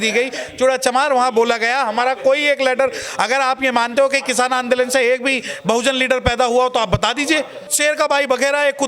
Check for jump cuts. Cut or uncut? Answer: cut